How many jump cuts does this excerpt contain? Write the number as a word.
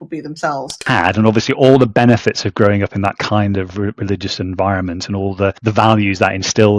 two